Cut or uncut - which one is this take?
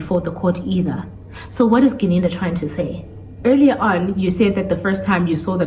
cut